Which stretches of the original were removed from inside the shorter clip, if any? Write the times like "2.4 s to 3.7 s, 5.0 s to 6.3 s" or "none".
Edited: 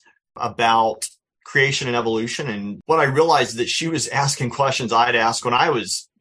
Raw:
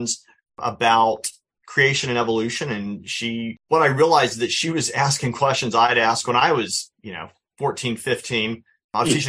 3.0 s to 3.6 s